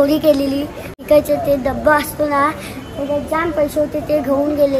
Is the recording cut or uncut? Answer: cut